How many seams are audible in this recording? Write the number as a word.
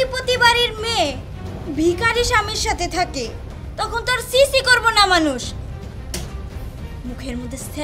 zero